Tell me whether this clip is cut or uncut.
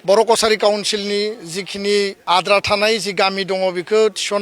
cut